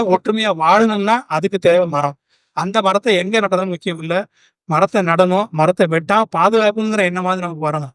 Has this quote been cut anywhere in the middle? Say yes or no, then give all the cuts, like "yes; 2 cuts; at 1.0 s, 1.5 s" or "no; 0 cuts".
no; 0 cuts